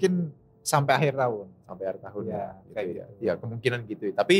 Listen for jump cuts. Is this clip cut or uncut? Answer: uncut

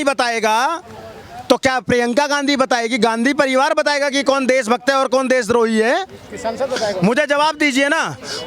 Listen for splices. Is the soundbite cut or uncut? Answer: uncut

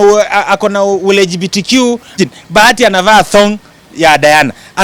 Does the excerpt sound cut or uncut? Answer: cut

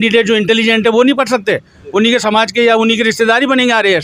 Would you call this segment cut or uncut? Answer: uncut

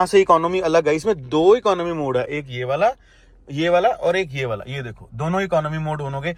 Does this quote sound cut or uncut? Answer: uncut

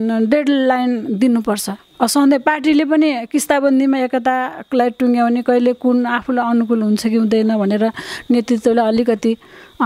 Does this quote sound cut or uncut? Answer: uncut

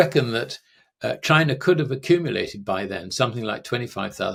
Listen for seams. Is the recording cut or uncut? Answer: uncut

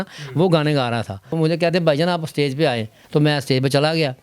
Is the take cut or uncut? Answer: cut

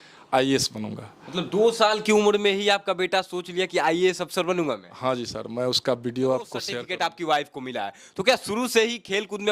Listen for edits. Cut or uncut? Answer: cut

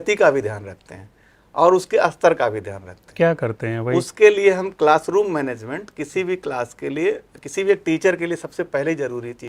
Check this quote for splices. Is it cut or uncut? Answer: uncut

